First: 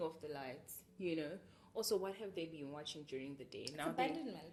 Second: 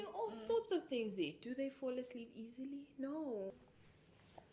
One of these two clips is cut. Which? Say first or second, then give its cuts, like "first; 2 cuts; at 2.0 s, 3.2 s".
second; 1 cut; at 3.5 s